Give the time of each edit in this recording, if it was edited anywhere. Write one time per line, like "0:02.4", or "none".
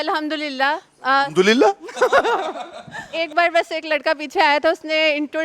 0:00.9
0:03.1